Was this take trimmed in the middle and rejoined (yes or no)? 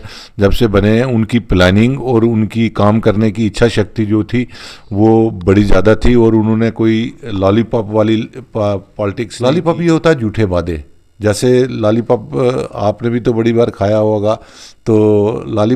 yes